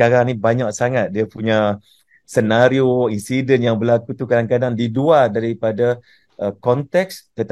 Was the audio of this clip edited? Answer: no; 0 cuts

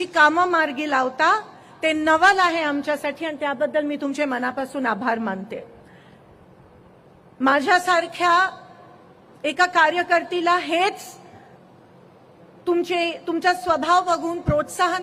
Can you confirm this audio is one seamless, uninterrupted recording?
yes; 0 cuts

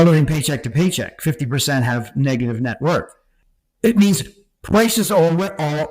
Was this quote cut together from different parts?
yes; 1 cut; at 3.6 s

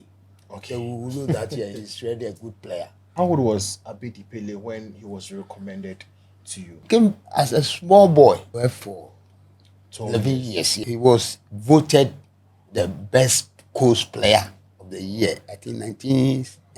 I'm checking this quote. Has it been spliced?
yes; 4 cuts; at 3.0 s, 6.8 s, 8.5 s, 10.9 s

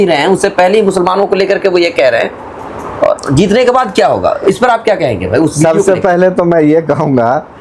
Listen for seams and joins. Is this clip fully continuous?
yes; 0 cuts

